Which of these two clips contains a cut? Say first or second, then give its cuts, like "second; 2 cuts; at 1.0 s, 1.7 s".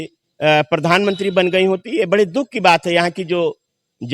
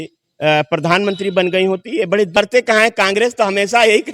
second; 1 cut; at 2.4 s